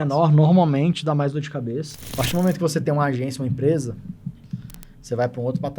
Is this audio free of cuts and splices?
no; 1 cut; at 2.0 s

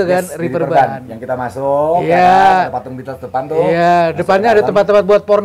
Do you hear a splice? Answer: no; 0 cuts

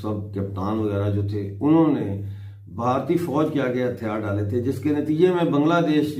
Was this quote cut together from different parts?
no; 0 cuts

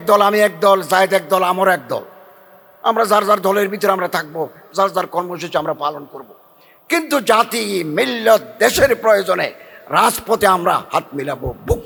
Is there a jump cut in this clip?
no; 0 cuts

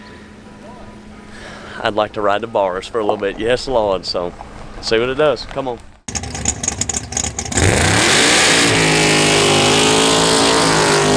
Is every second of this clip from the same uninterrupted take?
no; 1 cut; at 6.1 s

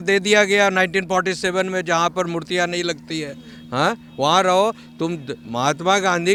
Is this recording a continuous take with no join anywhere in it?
yes; 0 cuts

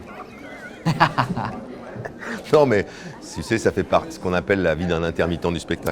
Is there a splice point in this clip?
no; 0 cuts

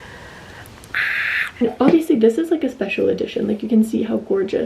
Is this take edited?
yes; 1 cut; at 1.6 s

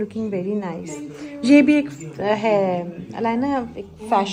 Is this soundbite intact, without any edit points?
yes; 0 cuts

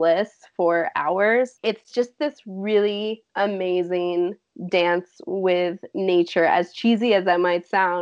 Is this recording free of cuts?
no; 2 cuts; at 1.6 s, 4.5 s

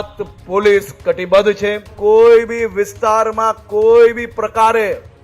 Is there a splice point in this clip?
yes; 1 cut; at 1.9 s

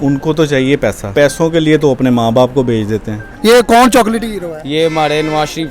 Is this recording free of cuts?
no; 2 cuts; at 1.1 s, 3.2 s

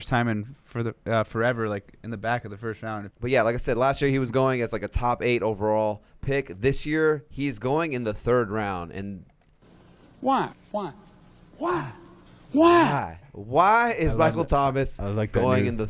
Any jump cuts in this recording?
yes; 1 cut; at 3.0 s

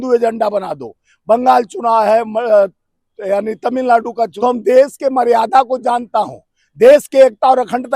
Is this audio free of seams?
no; 1 cut; at 4.3 s

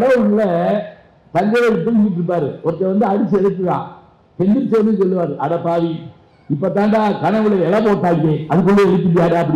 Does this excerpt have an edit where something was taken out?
no; 0 cuts

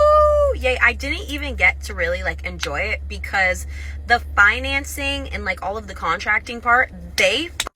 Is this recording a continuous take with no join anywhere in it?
yes; 0 cuts

